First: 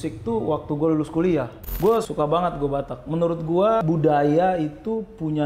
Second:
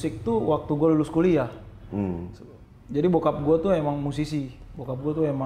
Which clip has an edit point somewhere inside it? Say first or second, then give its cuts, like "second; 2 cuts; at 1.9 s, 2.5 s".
first; 2 cuts; at 1.9 s, 3.8 s